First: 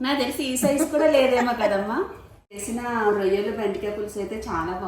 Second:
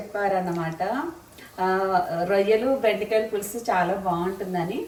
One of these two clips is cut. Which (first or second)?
first